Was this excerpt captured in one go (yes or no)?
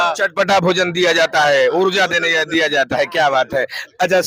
yes